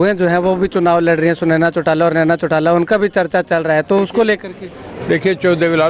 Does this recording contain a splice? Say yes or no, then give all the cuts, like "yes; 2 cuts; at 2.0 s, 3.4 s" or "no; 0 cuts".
no; 0 cuts